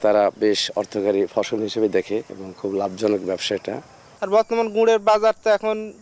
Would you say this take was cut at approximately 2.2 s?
no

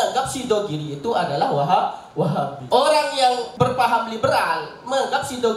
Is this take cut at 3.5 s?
yes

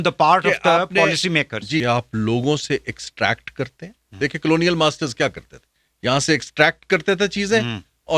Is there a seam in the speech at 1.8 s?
yes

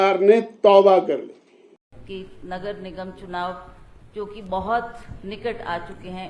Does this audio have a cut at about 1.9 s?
yes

